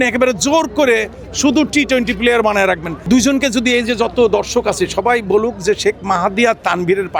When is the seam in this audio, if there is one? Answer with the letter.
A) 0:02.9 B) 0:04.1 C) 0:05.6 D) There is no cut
A